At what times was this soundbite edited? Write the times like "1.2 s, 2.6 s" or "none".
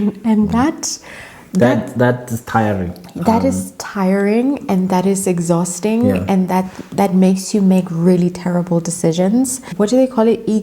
9.6 s